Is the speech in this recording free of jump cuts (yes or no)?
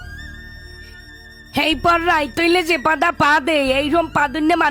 yes